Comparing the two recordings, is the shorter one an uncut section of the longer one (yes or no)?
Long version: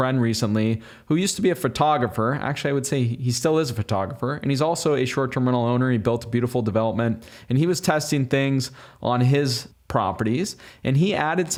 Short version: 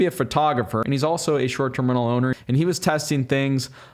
no